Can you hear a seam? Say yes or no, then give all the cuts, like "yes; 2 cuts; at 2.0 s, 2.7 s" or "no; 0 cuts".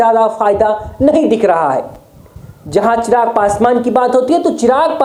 no; 0 cuts